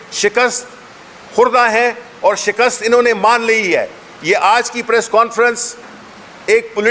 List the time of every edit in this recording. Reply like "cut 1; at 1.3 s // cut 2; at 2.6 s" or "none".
none